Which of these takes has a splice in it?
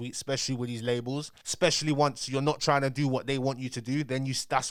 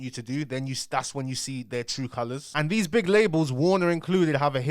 second; 1 cut; at 2.4 s

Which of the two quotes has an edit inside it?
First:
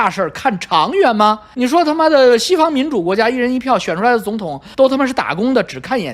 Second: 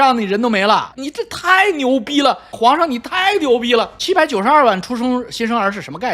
second; 3 cuts; at 0.9 s, 2.5 s, 4.0 s

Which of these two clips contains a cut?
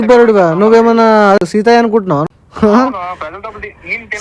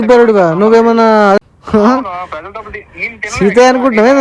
second; 1 cut; at 1.5 s

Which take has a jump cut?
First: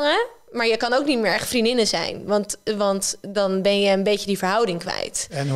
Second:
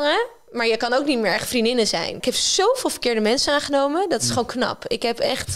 second; 1 cut; at 2.2 s

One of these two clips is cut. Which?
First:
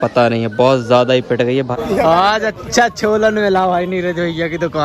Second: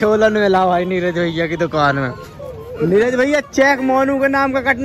first; 1 cut; at 1.7 s

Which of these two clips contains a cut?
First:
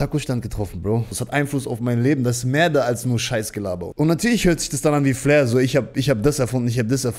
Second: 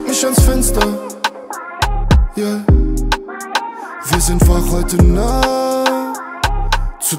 first; 2 cuts; at 1.2 s, 3.9 s

